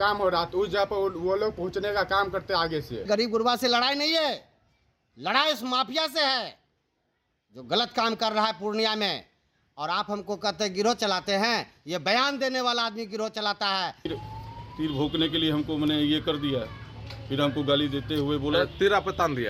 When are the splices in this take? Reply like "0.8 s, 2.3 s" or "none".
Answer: 3.1 s, 14.1 s